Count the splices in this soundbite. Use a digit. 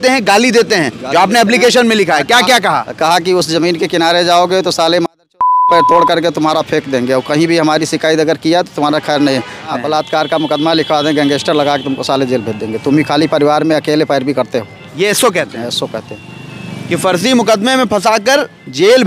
1